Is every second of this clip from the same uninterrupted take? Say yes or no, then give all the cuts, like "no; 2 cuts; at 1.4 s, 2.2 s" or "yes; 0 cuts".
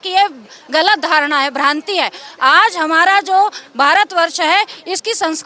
yes; 0 cuts